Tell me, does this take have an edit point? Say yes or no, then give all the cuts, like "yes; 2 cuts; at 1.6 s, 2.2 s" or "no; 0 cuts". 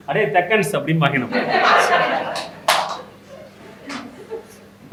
no; 0 cuts